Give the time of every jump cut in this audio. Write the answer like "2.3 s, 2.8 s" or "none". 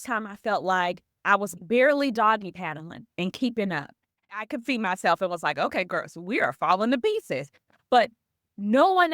1.6 s, 4.4 s